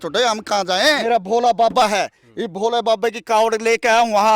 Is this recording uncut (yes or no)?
no